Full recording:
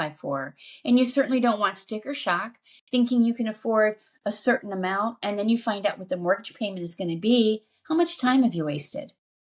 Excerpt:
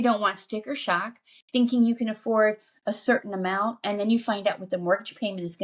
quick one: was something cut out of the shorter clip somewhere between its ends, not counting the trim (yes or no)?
no